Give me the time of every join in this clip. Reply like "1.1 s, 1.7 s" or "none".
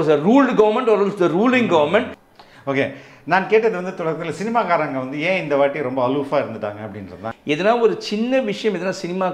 2.2 s, 7.3 s